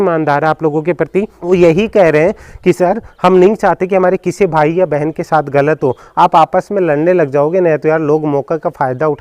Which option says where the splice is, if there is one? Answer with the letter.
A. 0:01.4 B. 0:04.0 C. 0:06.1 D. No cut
A